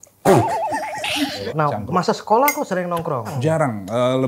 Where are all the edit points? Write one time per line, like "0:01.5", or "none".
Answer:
0:01.4
0:03.4